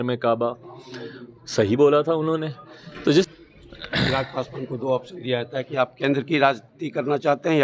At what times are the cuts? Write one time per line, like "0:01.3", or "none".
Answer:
0:03.3